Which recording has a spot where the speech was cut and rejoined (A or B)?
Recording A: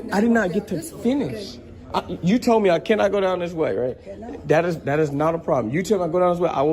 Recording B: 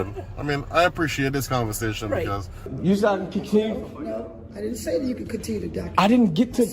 B